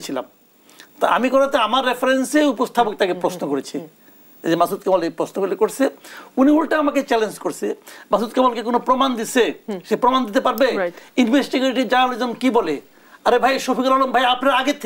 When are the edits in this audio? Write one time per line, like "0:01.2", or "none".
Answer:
none